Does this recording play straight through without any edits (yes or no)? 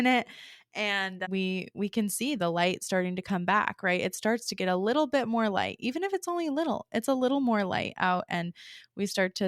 no